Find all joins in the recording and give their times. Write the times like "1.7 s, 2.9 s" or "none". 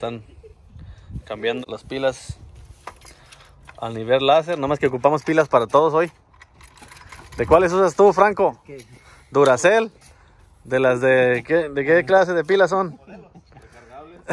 1.6 s